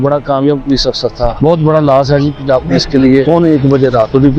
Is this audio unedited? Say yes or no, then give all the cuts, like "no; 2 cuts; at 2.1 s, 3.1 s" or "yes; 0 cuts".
no; 2 cuts; at 1.3 s, 3.2 s